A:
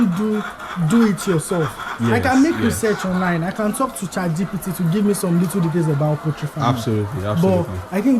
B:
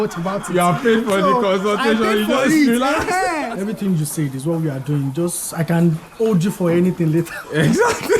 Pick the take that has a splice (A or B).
B